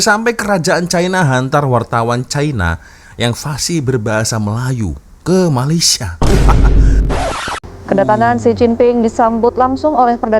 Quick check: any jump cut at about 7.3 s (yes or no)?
yes